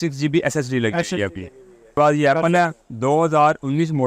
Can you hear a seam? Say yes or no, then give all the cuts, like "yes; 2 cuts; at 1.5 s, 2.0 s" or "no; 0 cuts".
yes; 1 cut; at 2.0 s